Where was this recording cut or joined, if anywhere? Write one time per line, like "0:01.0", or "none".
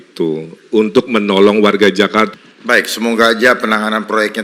0:02.3